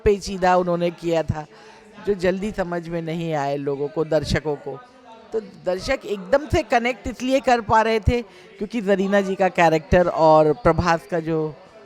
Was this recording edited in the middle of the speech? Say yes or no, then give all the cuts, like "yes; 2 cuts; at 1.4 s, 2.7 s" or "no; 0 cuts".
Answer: no; 0 cuts